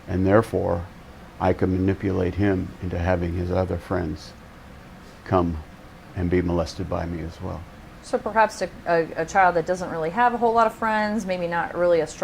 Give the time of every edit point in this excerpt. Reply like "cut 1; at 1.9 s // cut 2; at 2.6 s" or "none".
cut 1; at 8.2 s

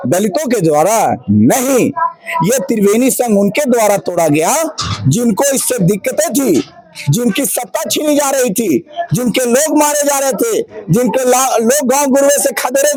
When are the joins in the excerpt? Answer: none

